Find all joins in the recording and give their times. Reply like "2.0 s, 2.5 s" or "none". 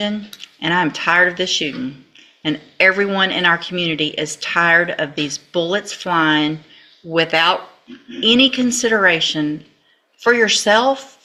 none